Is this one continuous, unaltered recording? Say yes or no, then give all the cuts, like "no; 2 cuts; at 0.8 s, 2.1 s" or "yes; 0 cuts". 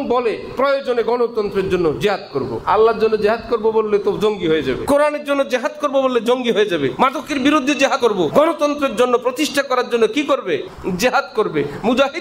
no; 5 cuts; at 2.6 s, 4.8 s, 6.9 s, 8.1 s, 10.7 s